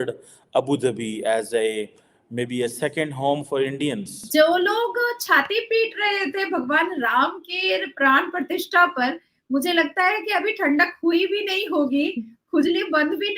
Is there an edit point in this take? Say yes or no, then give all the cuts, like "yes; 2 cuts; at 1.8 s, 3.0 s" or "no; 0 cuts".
yes; 1 cut; at 4.1 s